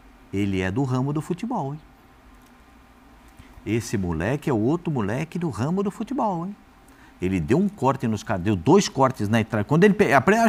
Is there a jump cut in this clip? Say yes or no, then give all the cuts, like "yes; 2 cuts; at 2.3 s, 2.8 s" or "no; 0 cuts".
no; 0 cuts